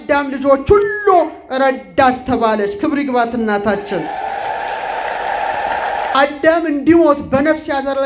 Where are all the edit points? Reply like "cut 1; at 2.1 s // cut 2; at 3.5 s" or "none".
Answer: cut 1; at 6.1 s